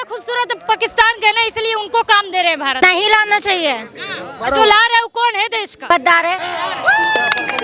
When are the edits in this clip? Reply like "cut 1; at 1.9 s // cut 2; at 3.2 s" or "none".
cut 1; at 2.7 s // cut 2; at 5.9 s // cut 3; at 6.4 s